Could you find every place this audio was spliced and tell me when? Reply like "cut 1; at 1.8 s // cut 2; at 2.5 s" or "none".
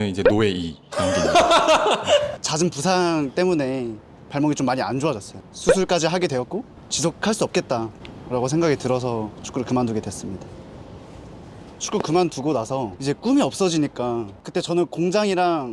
cut 1; at 2.3 s // cut 2; at 10.4 s // cut 3; at 11.8 s // cut 4; at 12.9 s // cut 5; at 14.4 s